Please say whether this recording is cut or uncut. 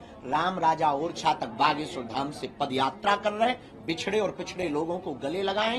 uncut